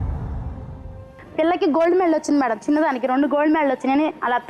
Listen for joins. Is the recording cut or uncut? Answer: cut